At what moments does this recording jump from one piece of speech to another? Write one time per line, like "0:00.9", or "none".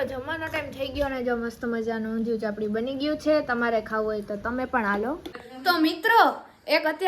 0:05.4